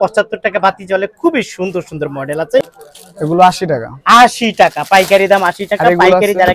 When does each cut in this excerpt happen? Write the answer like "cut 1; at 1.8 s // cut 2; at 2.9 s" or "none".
cut 1; at 2.6 s